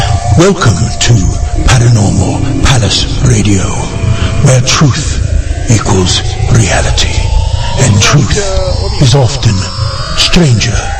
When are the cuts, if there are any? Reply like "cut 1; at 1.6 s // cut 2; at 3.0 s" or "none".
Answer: none

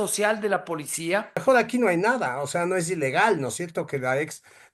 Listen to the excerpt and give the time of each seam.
cut 1; at 1.4 s

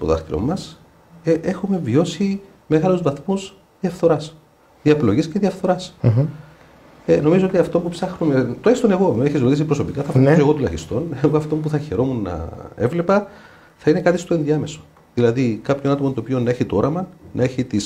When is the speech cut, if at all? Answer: none

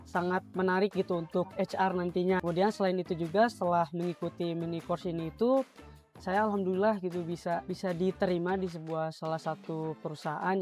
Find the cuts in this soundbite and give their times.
cut 1; at 2.4 s // cut 2; at 7.6 s

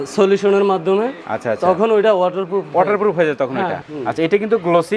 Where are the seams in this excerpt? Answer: cut 1; at 3.9 s

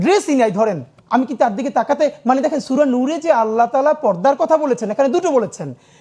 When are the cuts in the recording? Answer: cut 1; at 0.9 s

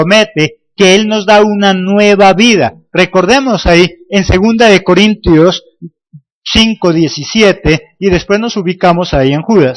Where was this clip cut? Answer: cut 1; at 2.3 s

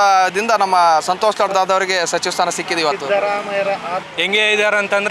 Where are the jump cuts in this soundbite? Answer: cut 1; at 4.1 s

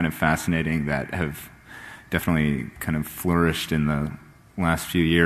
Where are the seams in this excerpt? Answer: cut 1; at 2.6 s

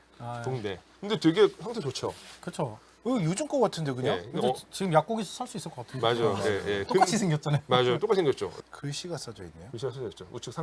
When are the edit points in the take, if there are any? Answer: cut 1; at 8.6 s

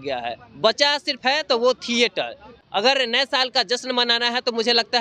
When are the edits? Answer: cut 1; at 2.5 s

